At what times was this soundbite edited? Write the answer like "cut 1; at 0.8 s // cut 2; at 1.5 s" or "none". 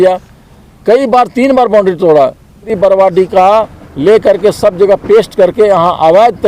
cut 1; at 2.7 s